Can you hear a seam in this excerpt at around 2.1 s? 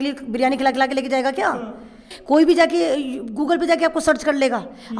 yes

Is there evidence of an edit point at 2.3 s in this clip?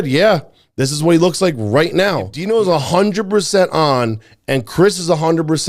yes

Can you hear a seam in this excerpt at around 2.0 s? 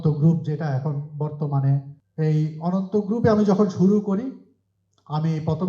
yes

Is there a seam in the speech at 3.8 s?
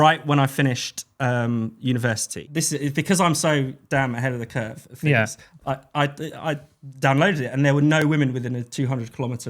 no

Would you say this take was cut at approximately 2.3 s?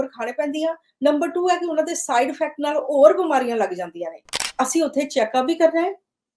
no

